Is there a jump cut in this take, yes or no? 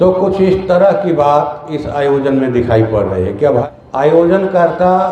yes